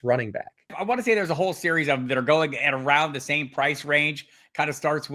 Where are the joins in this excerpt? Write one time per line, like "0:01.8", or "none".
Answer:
none